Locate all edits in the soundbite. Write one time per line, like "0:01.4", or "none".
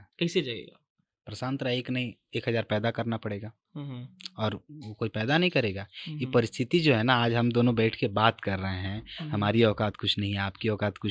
none